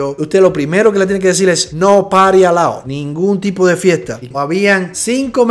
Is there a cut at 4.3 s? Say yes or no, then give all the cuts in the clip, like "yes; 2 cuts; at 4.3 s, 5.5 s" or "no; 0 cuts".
yes; 1 cut; at 4.3 s